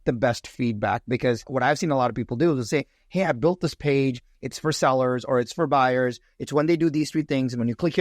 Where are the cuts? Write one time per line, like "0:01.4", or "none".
0:01.5

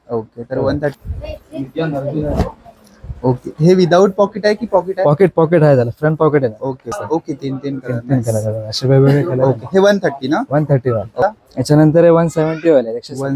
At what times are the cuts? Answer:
0:01.1
0:07.0
0:11.2

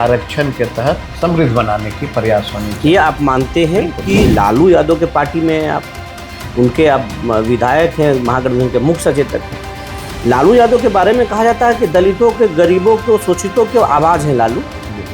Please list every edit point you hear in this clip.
0:04.3

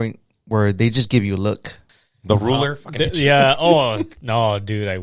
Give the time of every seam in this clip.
0:01.8

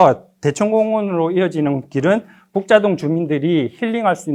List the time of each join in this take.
none

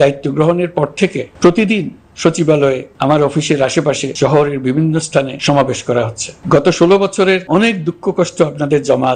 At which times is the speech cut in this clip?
0:01.2
0:02.9
0:04.1
0:05.3
0:06.3
0:07.4

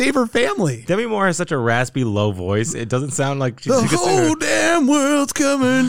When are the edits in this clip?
none

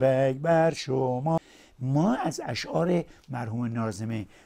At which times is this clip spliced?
0:01.5

